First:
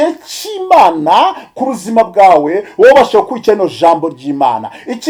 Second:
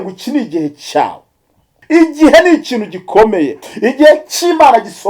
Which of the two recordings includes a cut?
second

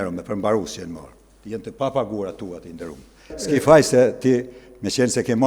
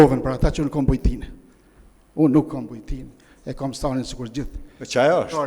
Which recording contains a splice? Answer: first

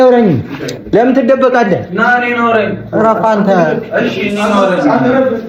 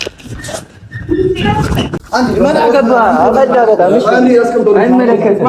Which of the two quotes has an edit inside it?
second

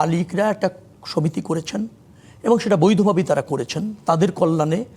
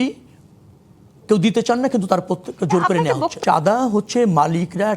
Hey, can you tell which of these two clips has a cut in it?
second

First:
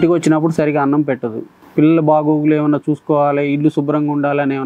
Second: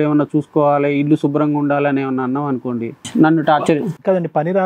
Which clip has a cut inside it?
second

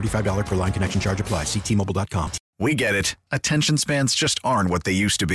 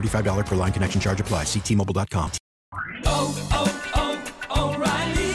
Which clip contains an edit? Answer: first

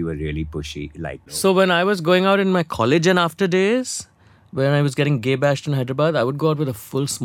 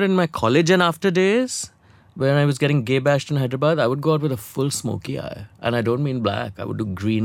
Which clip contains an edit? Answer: first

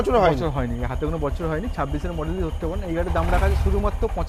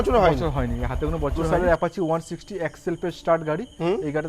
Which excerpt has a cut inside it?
second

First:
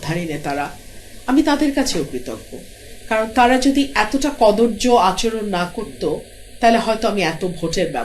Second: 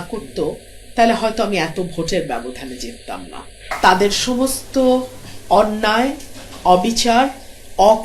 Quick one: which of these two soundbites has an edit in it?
second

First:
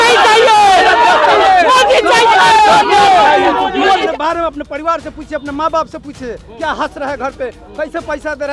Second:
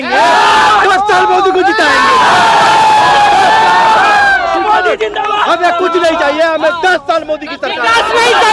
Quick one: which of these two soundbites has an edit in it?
first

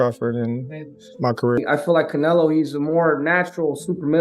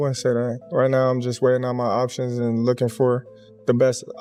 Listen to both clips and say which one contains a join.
first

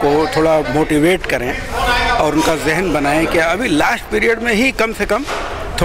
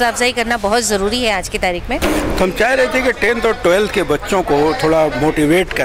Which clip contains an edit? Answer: second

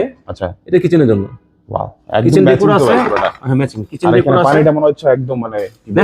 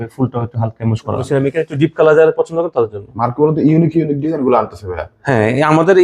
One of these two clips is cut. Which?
second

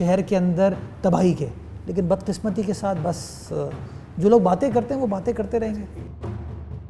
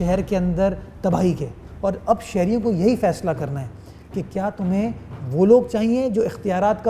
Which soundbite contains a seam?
second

